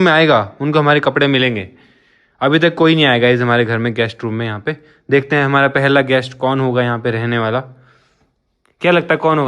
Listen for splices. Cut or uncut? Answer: uncut